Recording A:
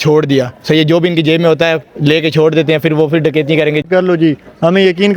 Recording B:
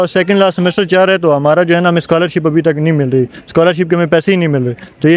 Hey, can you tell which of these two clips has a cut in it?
A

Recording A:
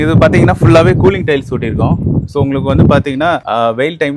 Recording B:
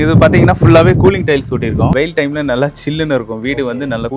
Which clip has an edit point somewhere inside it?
B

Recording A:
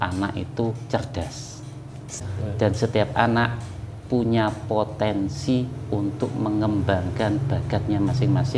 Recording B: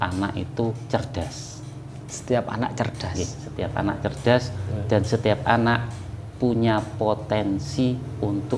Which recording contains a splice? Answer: A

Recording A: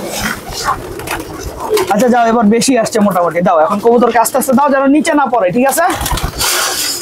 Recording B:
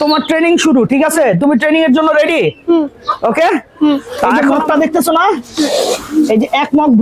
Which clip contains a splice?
B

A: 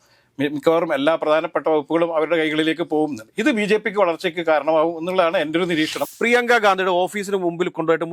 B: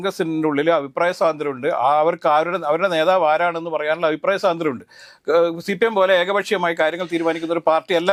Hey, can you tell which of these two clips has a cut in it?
A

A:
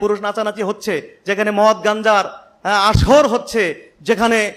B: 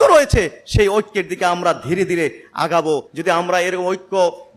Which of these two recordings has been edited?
B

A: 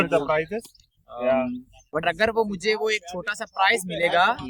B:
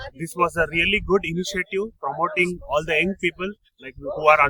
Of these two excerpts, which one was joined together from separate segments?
A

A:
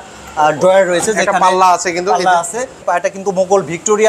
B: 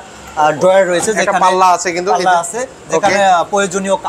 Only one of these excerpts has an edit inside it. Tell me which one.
A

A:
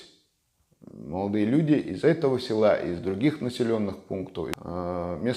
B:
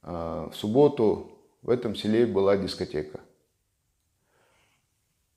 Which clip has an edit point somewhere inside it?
A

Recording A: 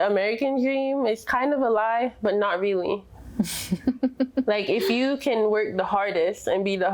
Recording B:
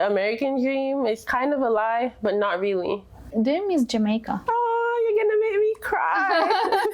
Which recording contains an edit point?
B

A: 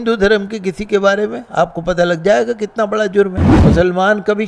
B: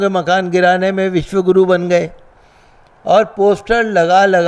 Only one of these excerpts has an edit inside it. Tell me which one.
A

